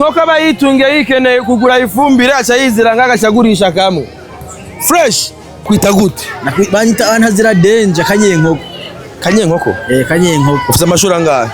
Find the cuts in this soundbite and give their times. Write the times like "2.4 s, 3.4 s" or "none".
5.6 s